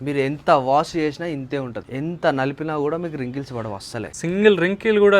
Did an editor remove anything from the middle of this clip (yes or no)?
yes